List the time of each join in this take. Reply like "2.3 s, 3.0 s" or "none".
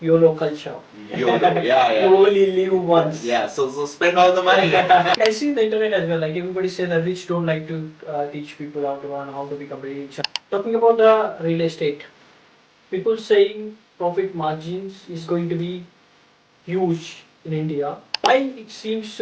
5.1 s, 10.2 s, 18.2 s

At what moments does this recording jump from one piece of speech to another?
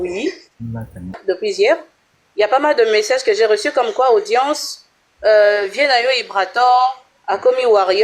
1.2 s

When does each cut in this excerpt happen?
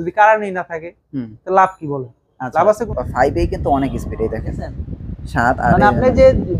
2.9 s

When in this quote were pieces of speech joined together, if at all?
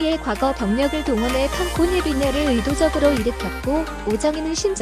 none

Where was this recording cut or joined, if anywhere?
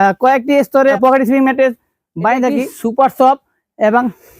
0.9 s, 2.8 s

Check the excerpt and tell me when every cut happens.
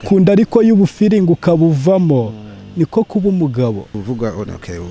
3.9 s

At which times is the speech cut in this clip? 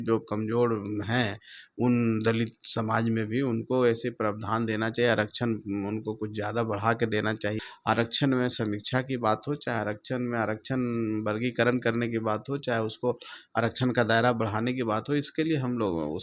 7.7 s

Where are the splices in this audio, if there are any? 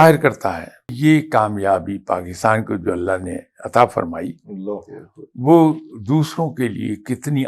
0.9 s

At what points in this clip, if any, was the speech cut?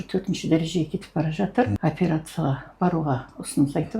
1.7 s

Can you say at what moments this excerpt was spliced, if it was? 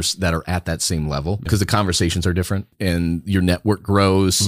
1.5 s, 2.7 s

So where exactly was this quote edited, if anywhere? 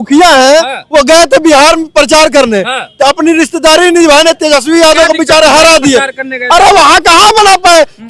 none

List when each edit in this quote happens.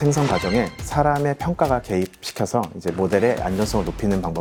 none

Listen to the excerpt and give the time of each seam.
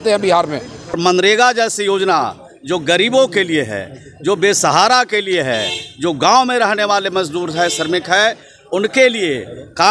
1.0 s

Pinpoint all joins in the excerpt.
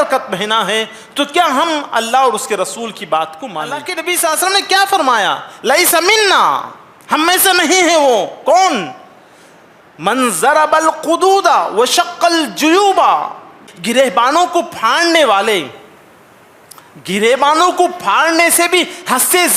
3.8 s, 13.7 s

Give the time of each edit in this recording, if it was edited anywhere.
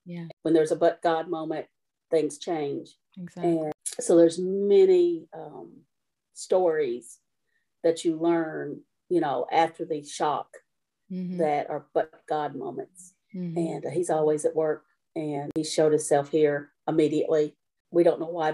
none

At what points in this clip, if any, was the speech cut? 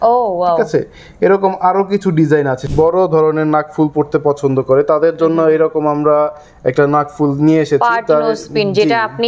2.6 s

